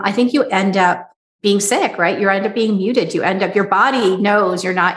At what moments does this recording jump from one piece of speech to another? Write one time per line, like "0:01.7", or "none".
0:01.1